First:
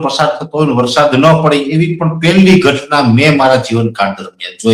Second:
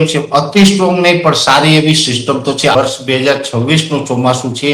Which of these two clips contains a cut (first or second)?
second